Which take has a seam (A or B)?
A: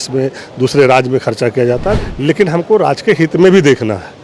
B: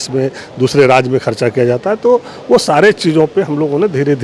A